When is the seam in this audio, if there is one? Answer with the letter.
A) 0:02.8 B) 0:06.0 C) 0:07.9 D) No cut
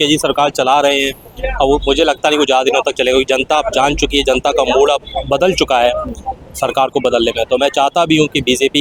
D